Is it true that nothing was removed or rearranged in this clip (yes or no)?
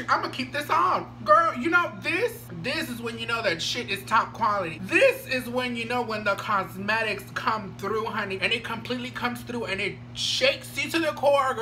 no